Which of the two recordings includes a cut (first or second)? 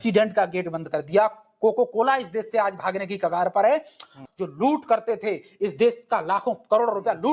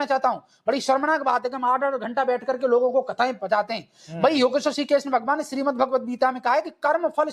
first